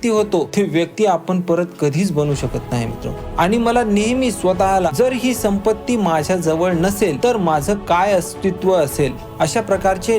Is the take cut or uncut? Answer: cut